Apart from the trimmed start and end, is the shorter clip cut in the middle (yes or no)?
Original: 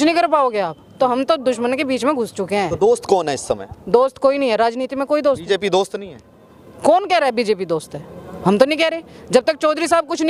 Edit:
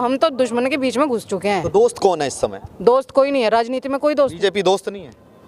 no